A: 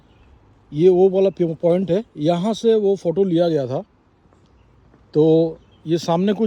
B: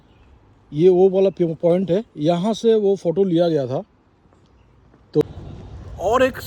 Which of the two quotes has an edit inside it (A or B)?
B